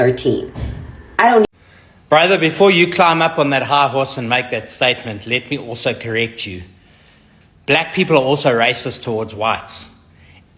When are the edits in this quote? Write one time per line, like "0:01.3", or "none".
0:01.4